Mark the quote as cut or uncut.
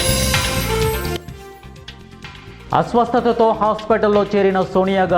uncut